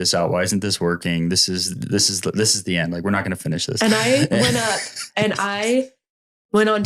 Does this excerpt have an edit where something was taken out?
no; 0 cuts

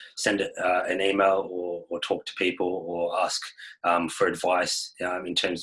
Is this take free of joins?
yes; 0 cuts

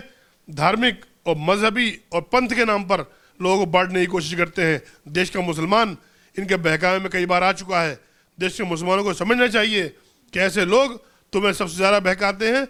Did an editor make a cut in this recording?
no; 0 cuts

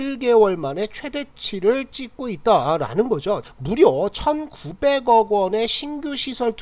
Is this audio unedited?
no; 1 cut; at 3.5 s

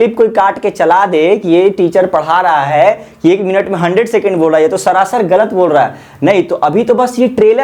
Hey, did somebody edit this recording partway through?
no; 0 cuts

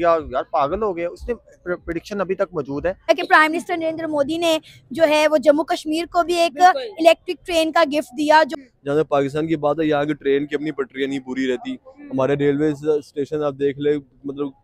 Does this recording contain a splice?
yes; 2 cuts; at 3.1 s, 8.5 s

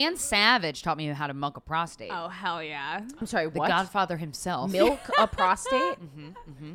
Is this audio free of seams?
yes; 0 cuts

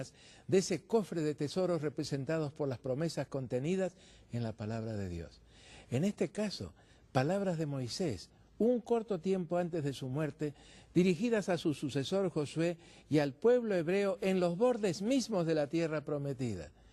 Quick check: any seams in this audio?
no; 0 cuts

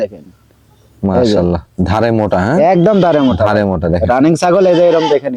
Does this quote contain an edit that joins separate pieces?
no; 0 cuts

